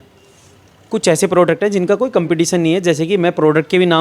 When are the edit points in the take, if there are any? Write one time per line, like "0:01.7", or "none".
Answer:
none